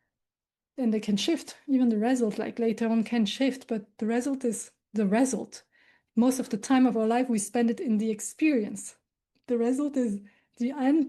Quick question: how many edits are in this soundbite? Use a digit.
0